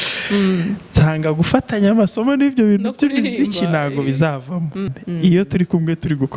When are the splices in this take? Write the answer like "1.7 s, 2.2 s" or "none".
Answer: 4.9 s